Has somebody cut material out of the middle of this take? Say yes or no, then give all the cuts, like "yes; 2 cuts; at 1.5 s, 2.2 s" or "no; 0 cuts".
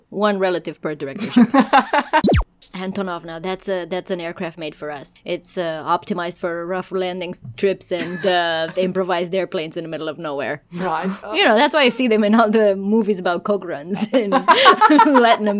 yes; 1 cut; at 2.3 s